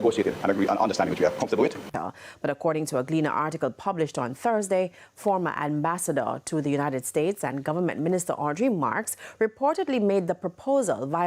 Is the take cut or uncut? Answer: cut